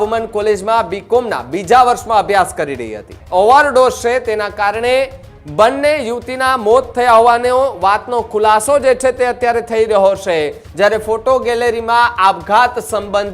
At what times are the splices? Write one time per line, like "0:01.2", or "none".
0:03.2
0:10.6